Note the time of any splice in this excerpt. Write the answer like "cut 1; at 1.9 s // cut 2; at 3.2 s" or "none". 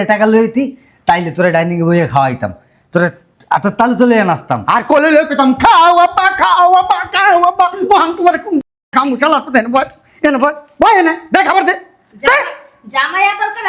none